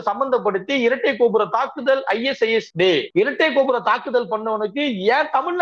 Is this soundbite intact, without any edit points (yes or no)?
no